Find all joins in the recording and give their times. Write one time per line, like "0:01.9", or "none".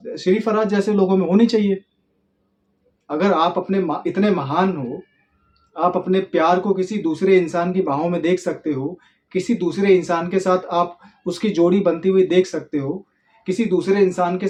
none